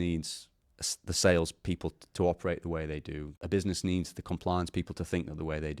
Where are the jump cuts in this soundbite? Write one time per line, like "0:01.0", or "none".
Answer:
0:03.3